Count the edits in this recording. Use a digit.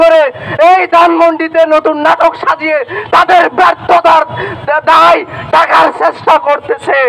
0